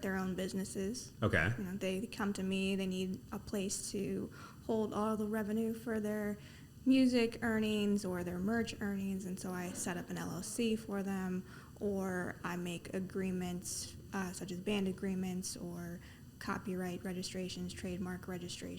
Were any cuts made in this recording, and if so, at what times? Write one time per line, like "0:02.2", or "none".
0:03.3